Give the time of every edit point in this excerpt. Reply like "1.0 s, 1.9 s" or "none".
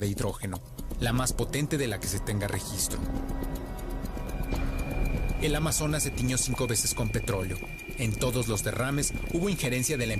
1.1 s